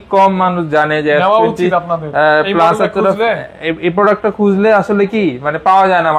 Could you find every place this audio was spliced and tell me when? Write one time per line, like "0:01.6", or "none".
none